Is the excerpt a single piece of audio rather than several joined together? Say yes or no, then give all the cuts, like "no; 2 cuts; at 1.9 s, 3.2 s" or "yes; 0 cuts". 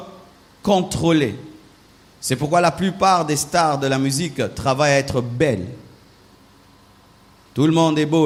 yes; 0 cuts